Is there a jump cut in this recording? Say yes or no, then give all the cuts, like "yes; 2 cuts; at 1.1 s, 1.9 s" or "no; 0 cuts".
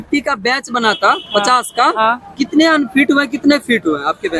no; 0 cuts